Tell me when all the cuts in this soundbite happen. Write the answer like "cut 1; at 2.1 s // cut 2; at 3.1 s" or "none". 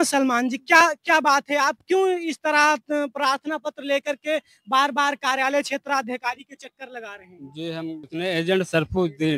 cut 1; at 8.1 s